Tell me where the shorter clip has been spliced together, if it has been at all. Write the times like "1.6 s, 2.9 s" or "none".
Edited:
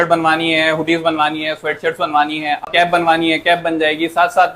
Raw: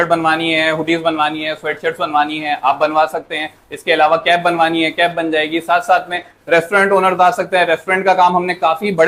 2.7 s